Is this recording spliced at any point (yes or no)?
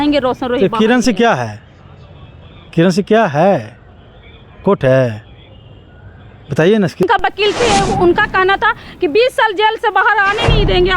yes